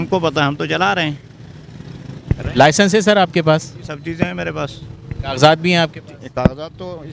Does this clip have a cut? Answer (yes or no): no